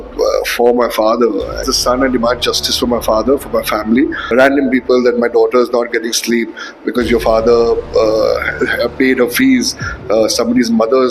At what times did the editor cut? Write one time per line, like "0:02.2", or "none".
0:01.7
0:04.2